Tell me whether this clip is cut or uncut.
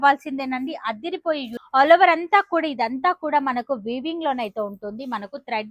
cut